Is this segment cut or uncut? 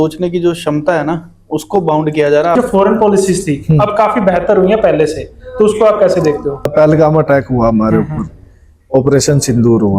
cut